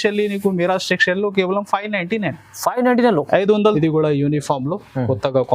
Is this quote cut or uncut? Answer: cut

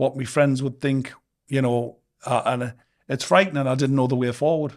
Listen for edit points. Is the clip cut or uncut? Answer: uncut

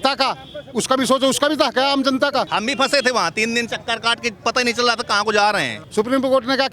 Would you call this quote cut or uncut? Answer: cut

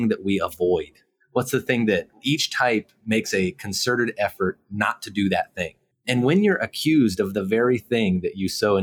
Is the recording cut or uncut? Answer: cut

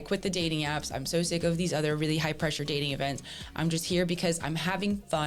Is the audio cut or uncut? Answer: uncut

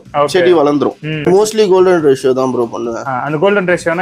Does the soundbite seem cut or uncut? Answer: cut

